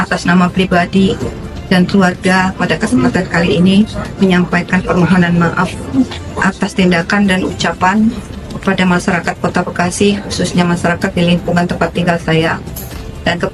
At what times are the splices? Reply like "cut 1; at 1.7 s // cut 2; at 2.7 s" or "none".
cut 1; at 1.1 s